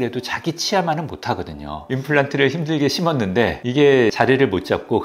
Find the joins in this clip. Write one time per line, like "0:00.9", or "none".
0:01.7